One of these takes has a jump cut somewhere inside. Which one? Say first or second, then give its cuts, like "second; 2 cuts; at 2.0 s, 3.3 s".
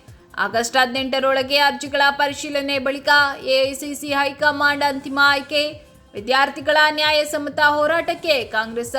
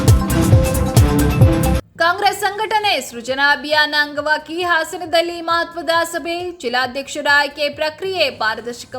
second; 1 cut; at 1.7 s